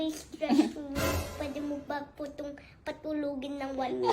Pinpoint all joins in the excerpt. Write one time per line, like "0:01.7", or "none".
0:01.3